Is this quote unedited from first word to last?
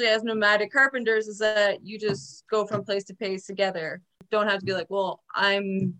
no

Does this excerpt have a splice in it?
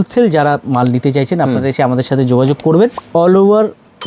yes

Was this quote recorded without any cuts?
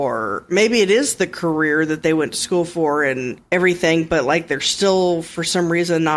yes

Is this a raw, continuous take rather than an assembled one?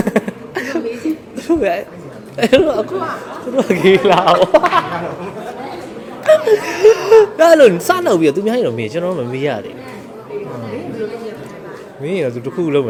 yes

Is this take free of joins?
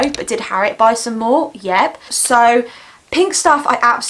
no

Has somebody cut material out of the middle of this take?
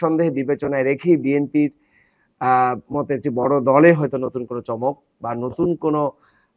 no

